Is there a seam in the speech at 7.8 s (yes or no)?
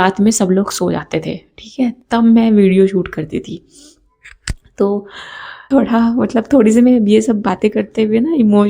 no